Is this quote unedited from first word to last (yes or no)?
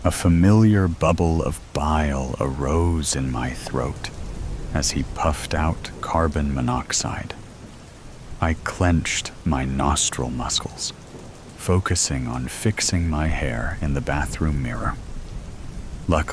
no